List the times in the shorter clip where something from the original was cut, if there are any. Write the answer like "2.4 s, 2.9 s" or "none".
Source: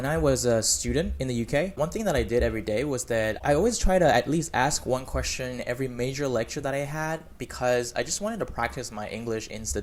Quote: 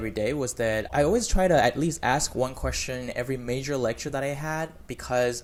none